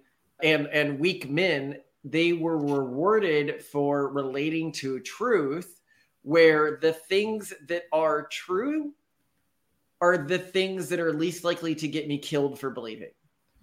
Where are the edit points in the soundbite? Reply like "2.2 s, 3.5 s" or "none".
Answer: none